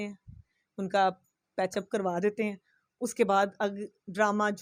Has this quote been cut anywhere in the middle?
no; 0 cuts

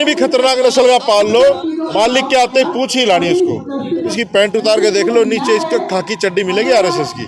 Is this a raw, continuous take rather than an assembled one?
no; 1 cut; at 4.1 s

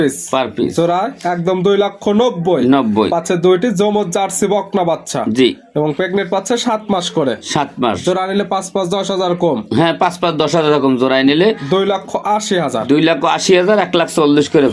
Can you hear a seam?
no; 0 cuts

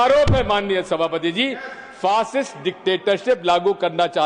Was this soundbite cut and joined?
no; 0 cuts

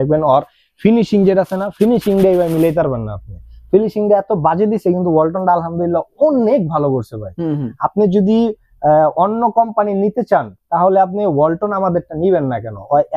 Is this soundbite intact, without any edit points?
yes; 0 cuts

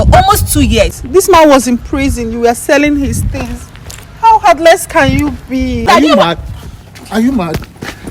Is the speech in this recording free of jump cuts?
no; 2 cuts; at 1.0 s, 5.9 s

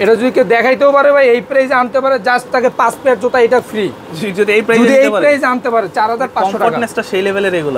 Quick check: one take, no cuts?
yes; 0 cuts

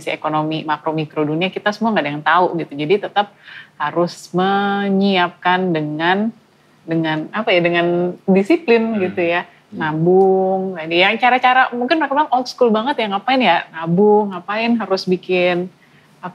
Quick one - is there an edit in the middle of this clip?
no; 0 cuts

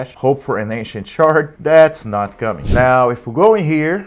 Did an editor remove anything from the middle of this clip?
yes; 1 cut; at 2.6 s

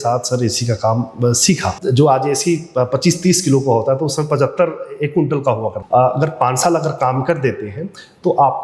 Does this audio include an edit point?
yes; 2 cuts; at 1.8 s, 5.7 s

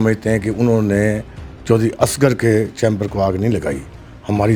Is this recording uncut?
yes; 0 cuts

